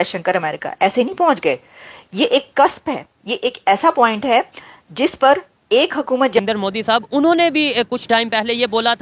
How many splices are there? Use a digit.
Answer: 1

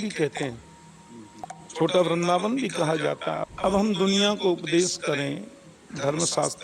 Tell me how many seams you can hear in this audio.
1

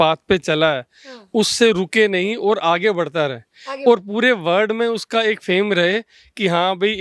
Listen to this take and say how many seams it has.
0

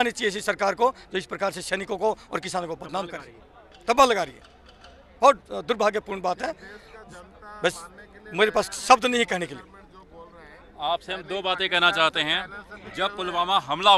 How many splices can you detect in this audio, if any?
0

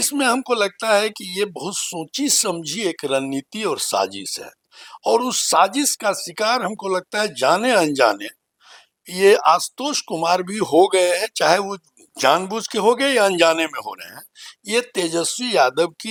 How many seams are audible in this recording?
0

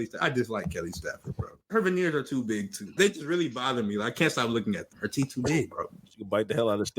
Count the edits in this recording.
3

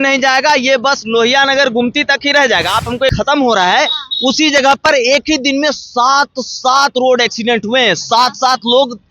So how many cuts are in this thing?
1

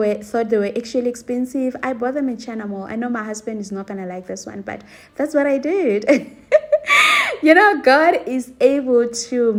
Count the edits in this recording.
0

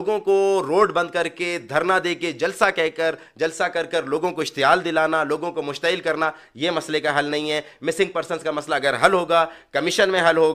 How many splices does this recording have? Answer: 0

